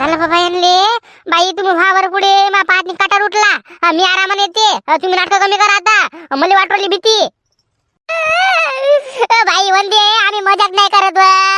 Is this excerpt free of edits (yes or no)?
yes